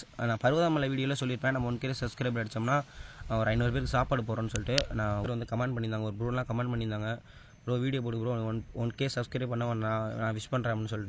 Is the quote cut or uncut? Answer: cut